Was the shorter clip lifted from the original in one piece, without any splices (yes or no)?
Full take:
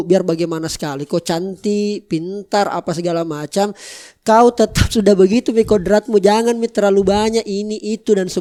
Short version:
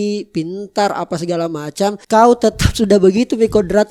no